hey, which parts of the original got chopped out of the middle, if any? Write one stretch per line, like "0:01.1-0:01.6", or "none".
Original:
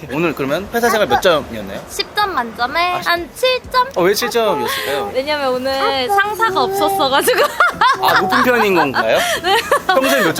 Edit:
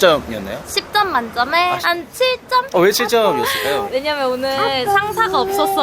none